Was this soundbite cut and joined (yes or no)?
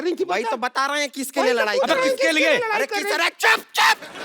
yes